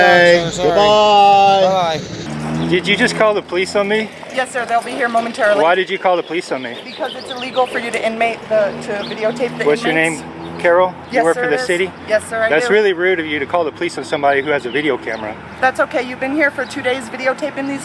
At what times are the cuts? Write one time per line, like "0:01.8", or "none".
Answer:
0:02.3